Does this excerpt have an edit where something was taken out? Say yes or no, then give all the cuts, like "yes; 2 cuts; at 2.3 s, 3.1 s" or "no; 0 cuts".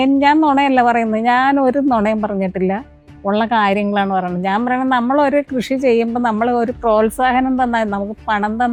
no; 0 cuts